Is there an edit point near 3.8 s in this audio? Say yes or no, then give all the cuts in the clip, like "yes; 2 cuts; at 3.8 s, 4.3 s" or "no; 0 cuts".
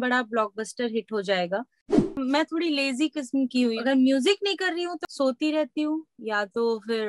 yes; 3 cuts; at 2.0 s, 3.8 s, 5.0 s